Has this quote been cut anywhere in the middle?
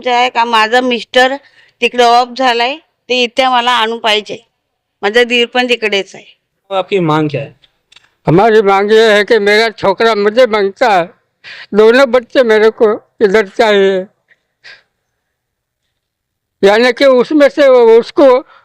yes; 1 cut; at 6.8 s

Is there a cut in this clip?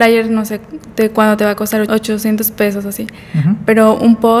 yes; 1 cut; at 1.9 s

